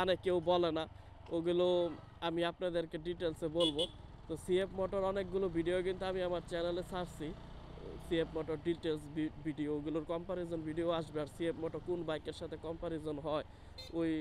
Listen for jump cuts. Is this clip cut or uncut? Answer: uncut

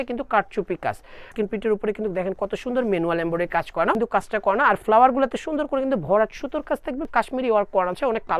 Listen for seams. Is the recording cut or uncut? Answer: cut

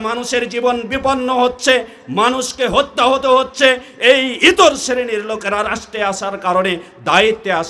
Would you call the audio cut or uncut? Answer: uncut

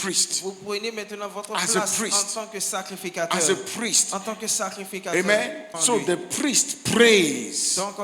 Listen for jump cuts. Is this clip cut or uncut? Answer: cut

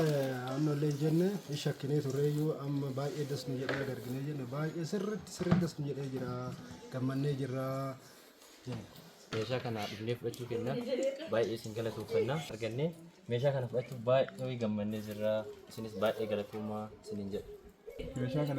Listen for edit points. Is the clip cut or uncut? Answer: cut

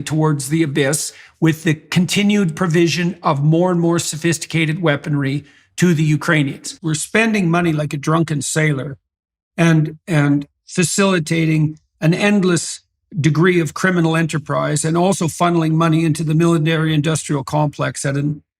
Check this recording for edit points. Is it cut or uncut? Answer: cut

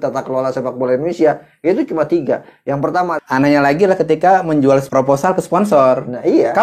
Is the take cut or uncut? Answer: cut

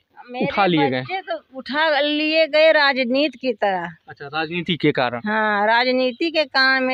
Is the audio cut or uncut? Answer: uncut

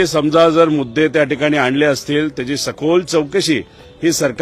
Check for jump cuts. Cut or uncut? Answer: uncut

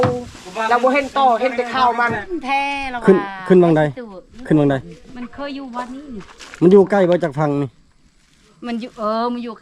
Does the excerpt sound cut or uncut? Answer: cut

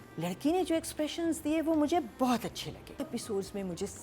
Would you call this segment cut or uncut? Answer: cut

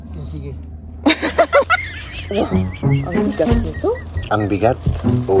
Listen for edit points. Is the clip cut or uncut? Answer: cut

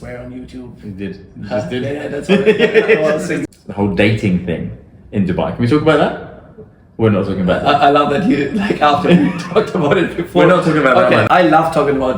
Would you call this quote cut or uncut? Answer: cut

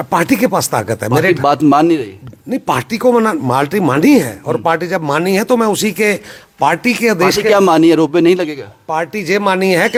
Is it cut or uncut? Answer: uncut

